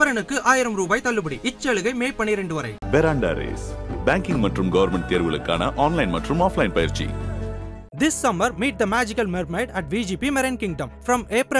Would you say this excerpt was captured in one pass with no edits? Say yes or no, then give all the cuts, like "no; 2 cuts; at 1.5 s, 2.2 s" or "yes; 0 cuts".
yes; 0 cuts